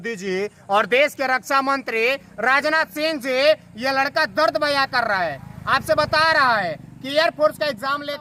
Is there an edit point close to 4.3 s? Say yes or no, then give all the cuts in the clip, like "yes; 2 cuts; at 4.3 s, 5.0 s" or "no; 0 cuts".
no; 0 cuts